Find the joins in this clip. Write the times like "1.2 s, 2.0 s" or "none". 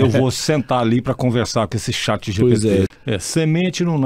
2.9 s